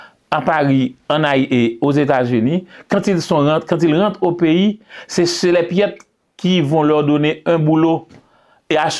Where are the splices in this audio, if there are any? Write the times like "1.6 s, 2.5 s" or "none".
none